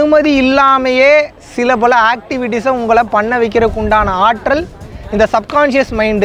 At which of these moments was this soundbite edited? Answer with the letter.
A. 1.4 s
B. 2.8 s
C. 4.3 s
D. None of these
D